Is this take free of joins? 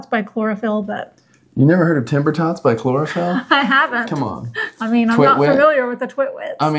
yes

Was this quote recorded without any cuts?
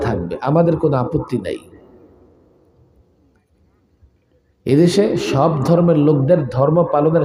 yes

